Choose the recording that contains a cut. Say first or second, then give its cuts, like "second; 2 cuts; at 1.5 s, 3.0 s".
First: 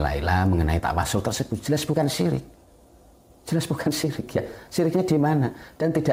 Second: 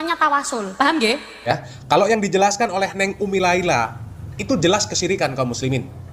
second; 1 cut; at 1.6 s